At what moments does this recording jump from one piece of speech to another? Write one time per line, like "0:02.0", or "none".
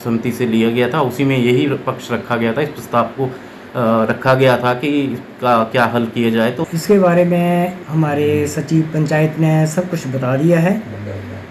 0:06.6